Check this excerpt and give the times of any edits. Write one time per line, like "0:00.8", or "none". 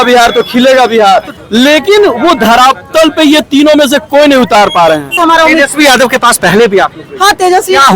0:01.3
0:05.2